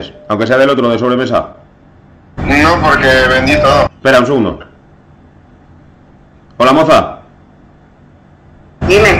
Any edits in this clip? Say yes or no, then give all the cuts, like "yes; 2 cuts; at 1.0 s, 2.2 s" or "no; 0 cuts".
no; 0 cuts